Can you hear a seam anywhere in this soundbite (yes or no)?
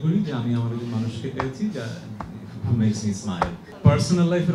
yes